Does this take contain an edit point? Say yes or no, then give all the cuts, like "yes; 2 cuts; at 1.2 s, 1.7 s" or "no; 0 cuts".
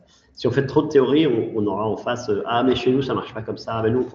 no; 0 cuts